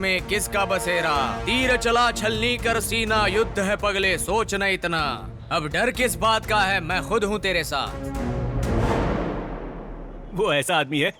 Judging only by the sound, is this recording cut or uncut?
cut